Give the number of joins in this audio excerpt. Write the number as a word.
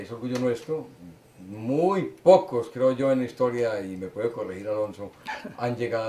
zero